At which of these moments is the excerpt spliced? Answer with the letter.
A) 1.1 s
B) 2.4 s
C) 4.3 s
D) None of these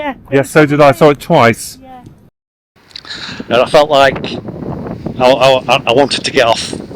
B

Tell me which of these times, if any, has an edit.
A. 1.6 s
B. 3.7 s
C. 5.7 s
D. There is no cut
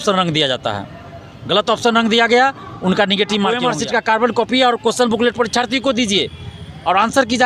B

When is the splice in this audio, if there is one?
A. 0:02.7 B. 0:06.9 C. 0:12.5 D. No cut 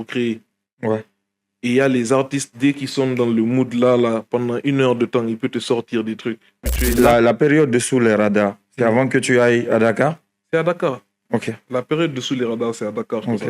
B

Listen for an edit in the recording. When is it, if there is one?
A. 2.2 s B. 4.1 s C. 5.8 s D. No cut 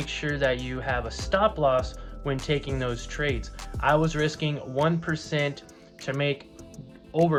D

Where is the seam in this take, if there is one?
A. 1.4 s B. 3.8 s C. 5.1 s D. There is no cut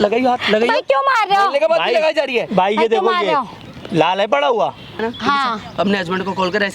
C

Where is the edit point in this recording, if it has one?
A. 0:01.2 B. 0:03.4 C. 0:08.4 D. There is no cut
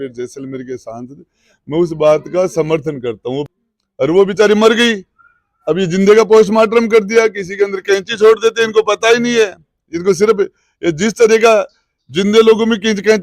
B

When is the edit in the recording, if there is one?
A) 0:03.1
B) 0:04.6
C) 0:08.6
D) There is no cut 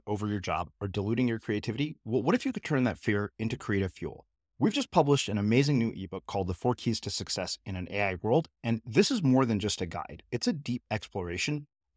D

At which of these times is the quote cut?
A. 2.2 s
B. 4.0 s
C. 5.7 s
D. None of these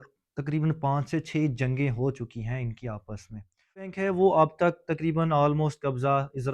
B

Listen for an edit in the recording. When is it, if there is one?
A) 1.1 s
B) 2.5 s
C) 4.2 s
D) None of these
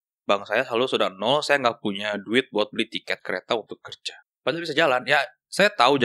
C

